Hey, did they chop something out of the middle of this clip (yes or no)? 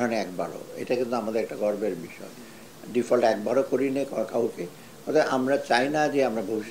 no